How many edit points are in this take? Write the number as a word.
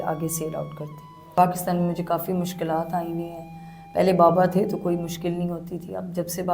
one